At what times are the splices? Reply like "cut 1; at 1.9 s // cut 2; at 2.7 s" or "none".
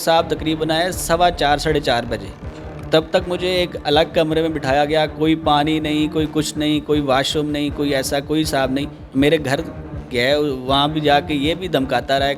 cut 1; at 9.0 s